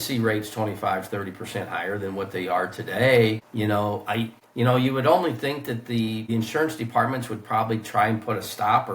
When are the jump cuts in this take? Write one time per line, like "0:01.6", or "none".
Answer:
0:03.5
0:04.4
0:06.2

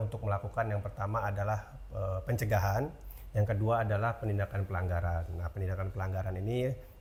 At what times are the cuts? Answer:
none

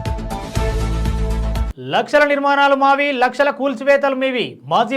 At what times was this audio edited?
0:01.6

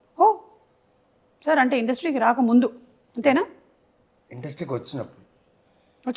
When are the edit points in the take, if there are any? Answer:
none

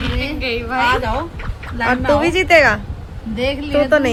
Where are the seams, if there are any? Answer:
none

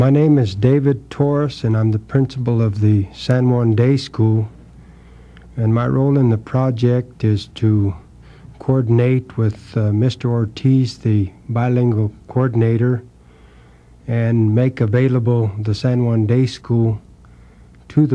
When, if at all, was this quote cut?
0:05.7

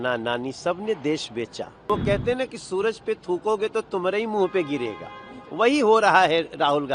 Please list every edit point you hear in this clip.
0:01.9

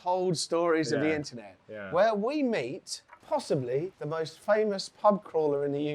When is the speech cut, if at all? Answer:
0:04.0

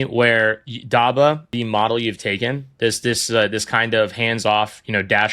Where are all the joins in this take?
0:01.5

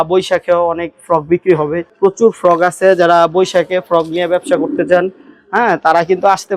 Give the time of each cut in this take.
0:01.8

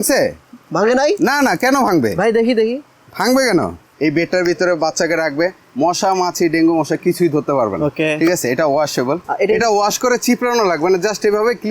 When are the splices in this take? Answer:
0:03.9
0:09.2

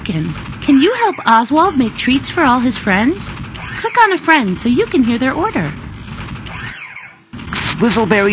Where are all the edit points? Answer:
0:05.7
0:07.4

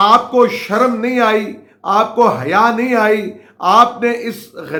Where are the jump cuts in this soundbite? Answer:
none

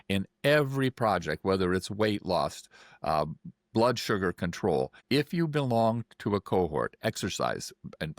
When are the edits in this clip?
0:05.0

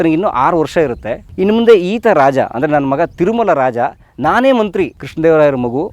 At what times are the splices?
0:01.2
0:05.0

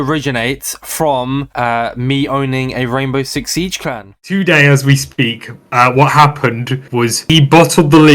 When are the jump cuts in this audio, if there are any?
0:04.2

